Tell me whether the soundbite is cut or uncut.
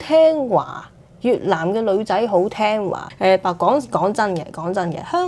cut